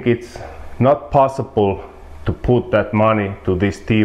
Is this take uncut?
yes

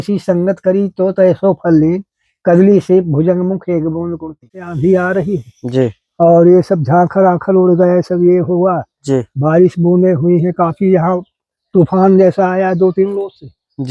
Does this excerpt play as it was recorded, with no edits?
no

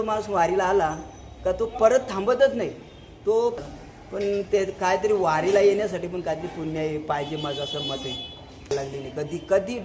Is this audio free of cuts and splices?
no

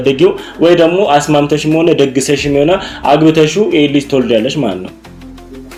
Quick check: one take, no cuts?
yes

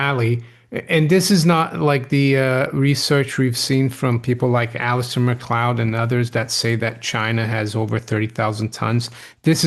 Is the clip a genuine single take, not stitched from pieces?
yes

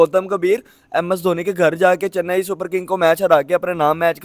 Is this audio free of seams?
yes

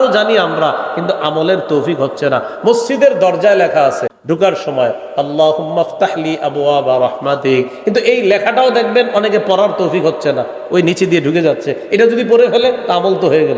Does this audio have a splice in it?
yes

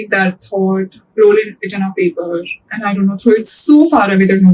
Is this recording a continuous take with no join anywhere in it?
yes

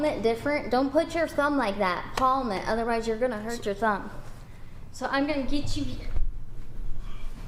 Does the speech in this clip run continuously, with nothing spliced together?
yes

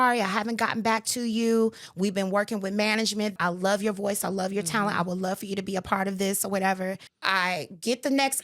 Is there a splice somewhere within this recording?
yes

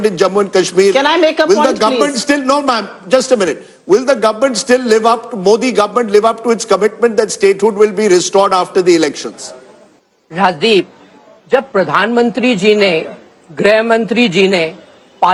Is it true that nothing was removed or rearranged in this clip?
yes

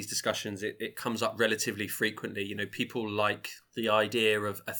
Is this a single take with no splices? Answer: no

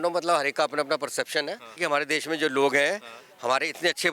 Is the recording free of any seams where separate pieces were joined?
no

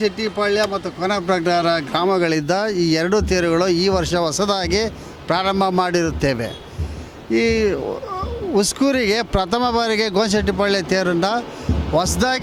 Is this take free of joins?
yes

